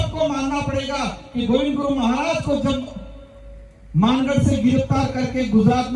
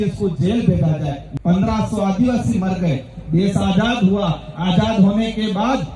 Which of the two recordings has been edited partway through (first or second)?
second